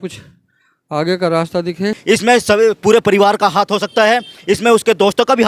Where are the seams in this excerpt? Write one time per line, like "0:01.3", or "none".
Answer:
0:02.0